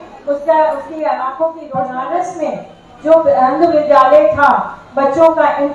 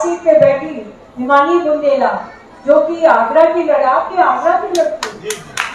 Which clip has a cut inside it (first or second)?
first